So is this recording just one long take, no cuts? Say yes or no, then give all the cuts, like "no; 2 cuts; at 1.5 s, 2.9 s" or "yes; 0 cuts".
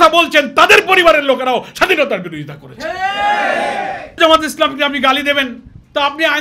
no; 1 cut; at 4.2 s